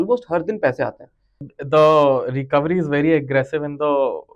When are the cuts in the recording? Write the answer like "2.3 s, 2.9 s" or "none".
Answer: 1.4 s

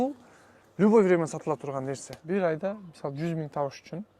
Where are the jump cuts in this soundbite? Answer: 2.1 s

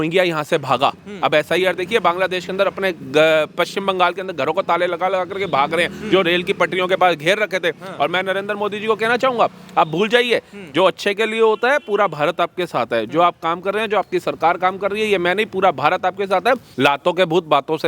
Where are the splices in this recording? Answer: 16.7 s

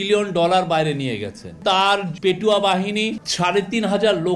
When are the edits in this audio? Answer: 1.6 s, 3.1 s

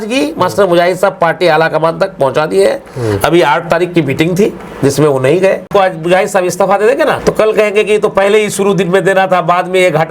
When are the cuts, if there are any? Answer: 5.7 s, 7.2 s

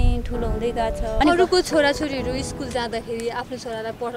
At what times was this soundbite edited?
1.2 s

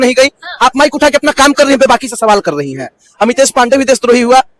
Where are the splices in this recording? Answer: none

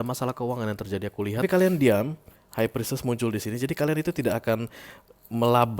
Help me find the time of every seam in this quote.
1.4 s

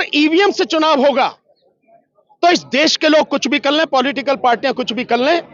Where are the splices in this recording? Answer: none

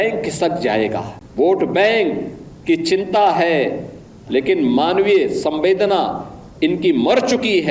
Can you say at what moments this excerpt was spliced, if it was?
1.2 s

